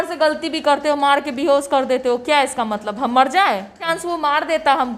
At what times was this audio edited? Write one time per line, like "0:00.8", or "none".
0:03.9